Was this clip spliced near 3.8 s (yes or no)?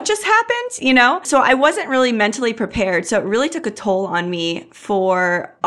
no